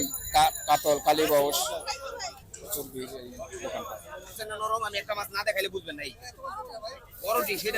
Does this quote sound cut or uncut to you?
cut